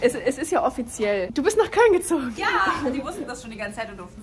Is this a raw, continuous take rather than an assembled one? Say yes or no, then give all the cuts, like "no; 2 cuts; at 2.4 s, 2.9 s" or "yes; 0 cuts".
no; 1 cut; at 2.3 s